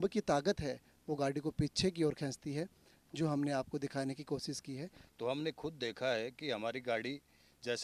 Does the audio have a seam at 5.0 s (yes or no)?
yes